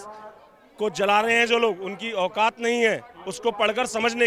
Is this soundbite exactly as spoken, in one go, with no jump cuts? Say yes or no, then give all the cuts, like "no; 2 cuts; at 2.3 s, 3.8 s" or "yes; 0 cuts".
yes; 0 cuts